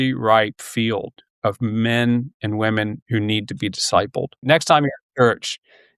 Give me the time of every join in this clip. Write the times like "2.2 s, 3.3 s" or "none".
4.4 s